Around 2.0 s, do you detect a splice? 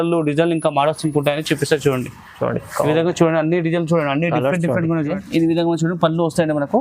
no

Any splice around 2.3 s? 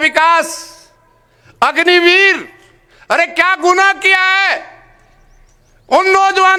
no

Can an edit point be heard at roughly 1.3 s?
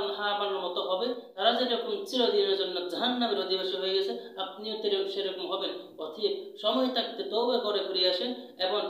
yes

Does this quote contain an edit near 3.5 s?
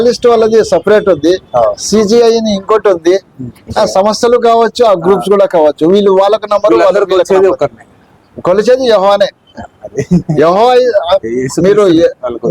yes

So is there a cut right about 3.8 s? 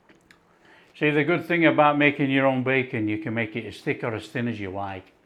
no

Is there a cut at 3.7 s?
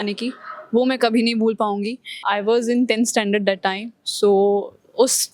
no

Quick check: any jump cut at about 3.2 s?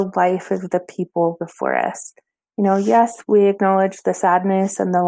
yes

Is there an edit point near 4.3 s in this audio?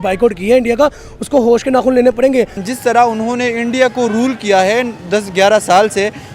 no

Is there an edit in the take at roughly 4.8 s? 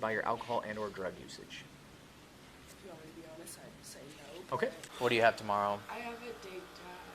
yes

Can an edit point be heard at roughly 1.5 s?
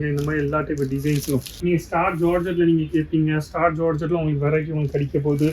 yes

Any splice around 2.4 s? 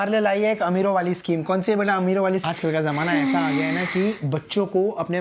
yes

